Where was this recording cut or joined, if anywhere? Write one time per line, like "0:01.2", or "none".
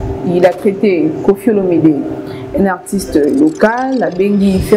none